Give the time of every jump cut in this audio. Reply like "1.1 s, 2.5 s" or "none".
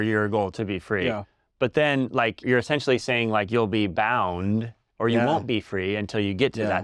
4.8 s